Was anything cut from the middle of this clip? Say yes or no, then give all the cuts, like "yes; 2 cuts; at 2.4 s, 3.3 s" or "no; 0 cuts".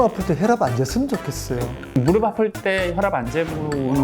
yes; 1 cut; at 1.8 s